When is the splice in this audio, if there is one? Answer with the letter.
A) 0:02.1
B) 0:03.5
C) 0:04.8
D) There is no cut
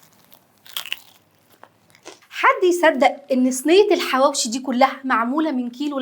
A